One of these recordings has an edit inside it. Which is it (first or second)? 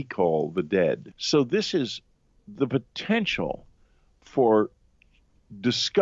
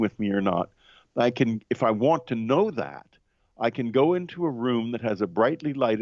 first